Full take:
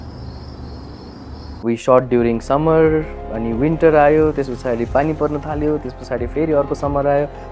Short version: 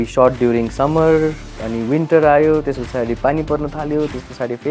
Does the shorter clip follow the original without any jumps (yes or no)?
yes